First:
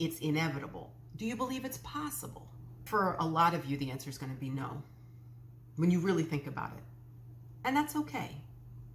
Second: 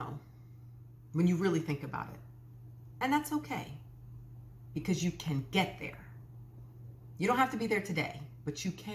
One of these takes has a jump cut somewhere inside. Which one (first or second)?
first